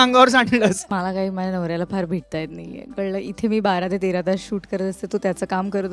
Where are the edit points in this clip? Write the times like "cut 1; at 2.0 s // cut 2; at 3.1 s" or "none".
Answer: cut 1; at 0.9 s